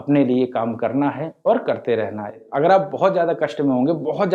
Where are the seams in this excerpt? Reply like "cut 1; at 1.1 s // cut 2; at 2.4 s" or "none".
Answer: cut 1; at 2.4 s